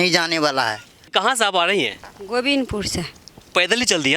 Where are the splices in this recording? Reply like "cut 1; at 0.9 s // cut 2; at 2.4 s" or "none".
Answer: cut 1; at 1.1 s